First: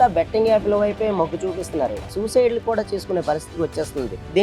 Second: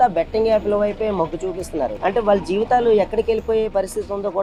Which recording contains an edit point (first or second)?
first